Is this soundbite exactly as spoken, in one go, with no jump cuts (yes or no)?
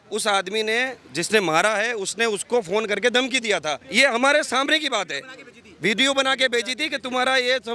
no